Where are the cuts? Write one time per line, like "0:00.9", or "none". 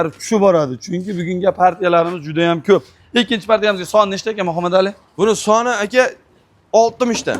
none

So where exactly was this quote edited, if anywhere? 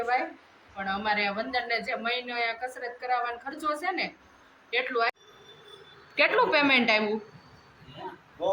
0:05.1

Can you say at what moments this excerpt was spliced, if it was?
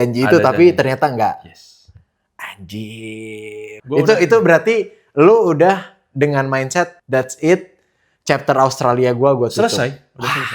0:03.7

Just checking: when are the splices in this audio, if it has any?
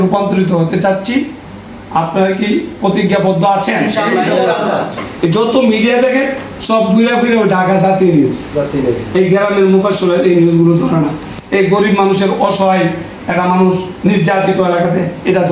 0:05.0

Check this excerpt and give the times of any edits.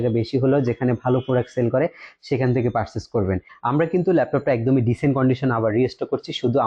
0:03.5

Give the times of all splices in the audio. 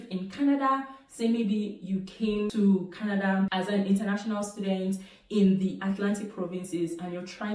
none

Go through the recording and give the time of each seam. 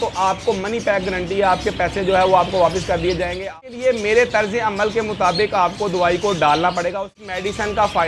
0:03.5
0:06.9

